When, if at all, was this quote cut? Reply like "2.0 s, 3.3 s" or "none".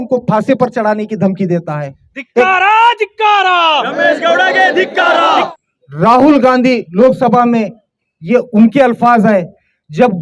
5.5 s